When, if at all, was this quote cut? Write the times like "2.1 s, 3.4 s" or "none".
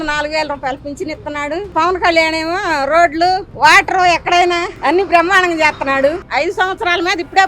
1.7 s, 6.2 s